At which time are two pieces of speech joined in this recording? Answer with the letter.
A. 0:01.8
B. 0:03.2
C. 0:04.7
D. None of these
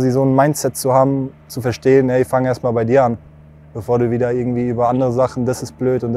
D